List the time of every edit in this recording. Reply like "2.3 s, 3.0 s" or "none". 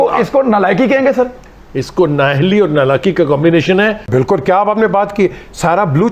4.1 s